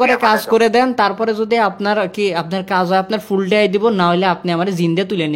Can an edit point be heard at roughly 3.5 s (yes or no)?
no